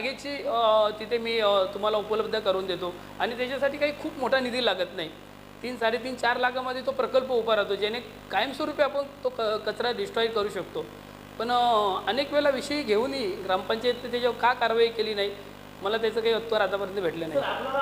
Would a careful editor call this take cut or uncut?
uncut